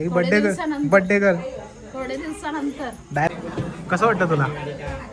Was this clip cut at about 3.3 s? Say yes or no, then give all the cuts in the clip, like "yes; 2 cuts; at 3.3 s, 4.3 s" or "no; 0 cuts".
yes; 1 cut; at 3.3 s